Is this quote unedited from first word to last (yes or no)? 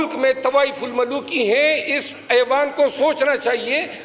yes